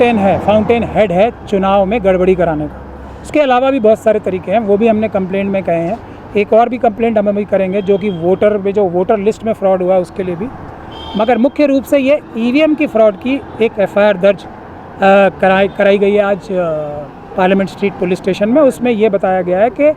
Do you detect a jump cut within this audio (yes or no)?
no